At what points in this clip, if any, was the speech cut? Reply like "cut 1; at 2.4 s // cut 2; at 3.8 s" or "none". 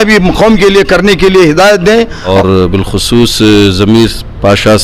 cut 1; at 2.3 s